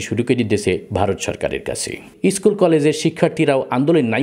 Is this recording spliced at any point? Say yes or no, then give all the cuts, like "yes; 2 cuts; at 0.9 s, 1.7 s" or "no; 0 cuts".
yes; 1 cut; at 2.1 s